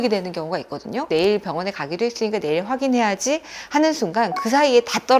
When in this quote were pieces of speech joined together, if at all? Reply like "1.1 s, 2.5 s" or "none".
1.1 s